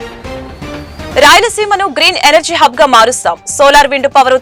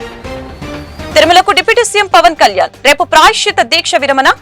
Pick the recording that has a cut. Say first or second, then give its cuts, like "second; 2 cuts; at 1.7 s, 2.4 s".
second; 1 cut; at 1.1 s